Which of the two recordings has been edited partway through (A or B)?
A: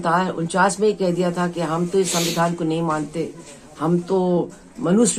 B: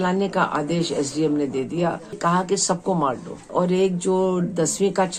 B